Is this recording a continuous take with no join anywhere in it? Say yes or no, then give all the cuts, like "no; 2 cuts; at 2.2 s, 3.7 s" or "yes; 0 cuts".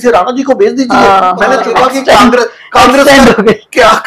no; 1 cut; at 1.7 s